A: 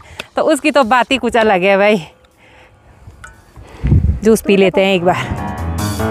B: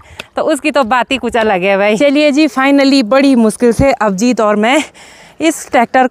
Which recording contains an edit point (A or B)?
B